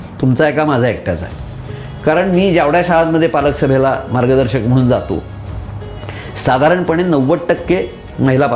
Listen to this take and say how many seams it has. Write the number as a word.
zero